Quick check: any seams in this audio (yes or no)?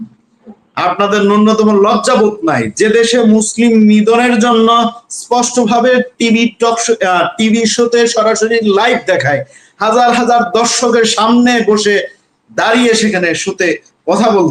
no